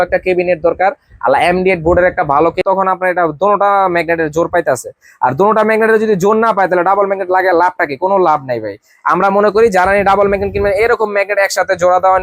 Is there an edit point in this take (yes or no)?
yes